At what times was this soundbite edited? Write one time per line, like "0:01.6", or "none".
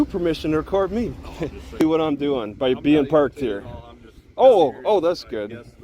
0:01.8